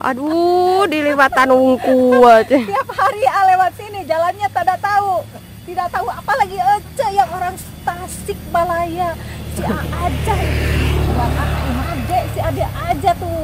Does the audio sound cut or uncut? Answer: cut